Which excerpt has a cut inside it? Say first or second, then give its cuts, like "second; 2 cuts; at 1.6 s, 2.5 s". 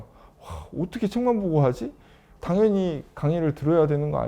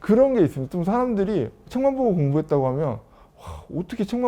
first; 1 cut; at 2.3 s